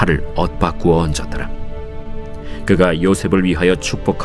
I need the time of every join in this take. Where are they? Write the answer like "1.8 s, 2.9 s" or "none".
2.0 s